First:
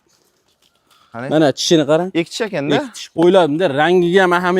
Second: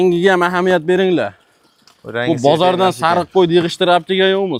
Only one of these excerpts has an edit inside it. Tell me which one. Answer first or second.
first